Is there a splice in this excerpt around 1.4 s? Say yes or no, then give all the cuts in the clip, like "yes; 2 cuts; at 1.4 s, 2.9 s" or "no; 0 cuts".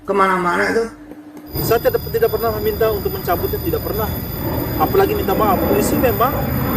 yes; 1 cut; at 1.4 s